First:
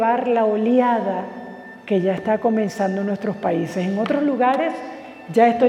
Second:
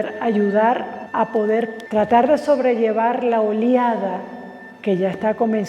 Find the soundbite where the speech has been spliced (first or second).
second